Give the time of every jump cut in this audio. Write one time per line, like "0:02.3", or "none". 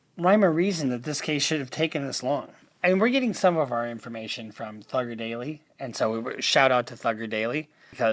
0:02.6